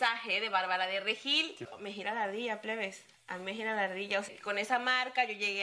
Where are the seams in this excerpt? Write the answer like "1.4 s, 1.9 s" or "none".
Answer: 1.7 s, 4.3 s